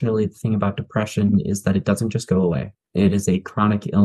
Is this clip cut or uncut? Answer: uncut